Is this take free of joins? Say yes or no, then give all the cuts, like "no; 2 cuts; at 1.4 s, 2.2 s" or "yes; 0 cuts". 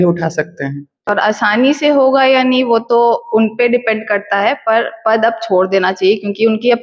no; 1 cut; at 1.1 s